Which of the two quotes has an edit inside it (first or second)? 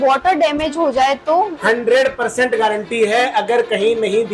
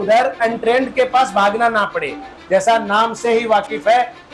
second